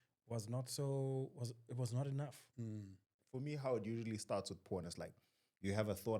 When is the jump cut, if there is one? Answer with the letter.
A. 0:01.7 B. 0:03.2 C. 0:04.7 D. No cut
B